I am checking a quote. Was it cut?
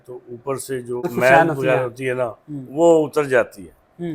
yes; 1 cut; at 1.1 s

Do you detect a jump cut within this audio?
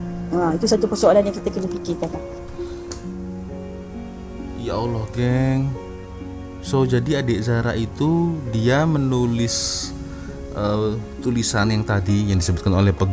no; 0 cuts

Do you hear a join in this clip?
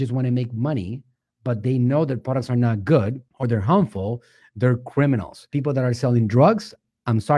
yes; 1 cut; at 3.3 s

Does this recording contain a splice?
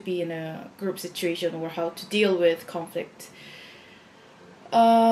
no; 0 cuts

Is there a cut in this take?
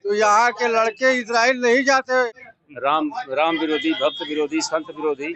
yes; 1 cut; at 2.3 s

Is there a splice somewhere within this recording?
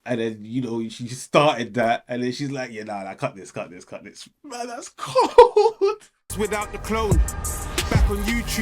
yes; 1 cut; at 6.2 s

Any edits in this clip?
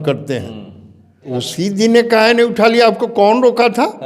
yes; 1 cut; at 1.4 s

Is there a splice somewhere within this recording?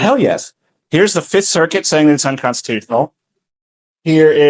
no; 0 cuts

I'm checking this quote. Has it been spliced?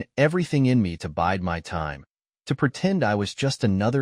no; 0 cuts

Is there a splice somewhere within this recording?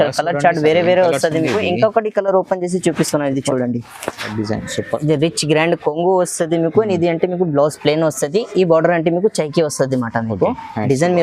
yes; 1 cut; at 4.3 s

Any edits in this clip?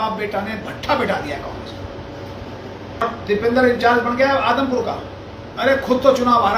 yes; 1 cut; at 3.0 s

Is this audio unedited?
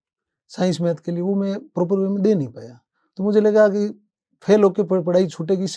yes; 0 cuts

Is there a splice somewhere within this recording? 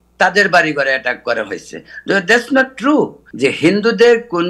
yes; 1 cut; at 3.2 s

